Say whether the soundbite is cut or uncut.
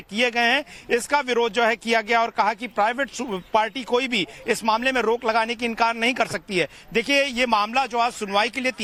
uncut